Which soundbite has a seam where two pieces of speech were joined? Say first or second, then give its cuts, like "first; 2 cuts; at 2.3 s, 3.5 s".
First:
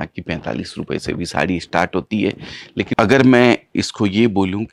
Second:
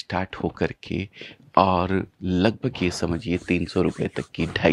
first; 1 cut; at 2.9 s